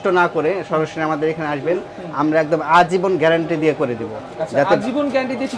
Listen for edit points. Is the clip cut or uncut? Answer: uncut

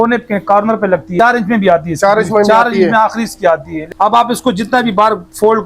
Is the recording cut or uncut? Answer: cut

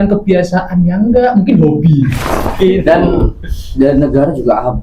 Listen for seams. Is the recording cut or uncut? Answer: cut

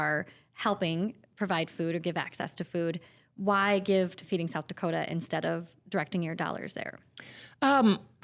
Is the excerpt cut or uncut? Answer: uncut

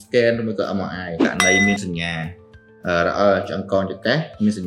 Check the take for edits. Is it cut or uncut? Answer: cut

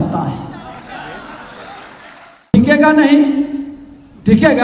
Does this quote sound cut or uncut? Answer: cut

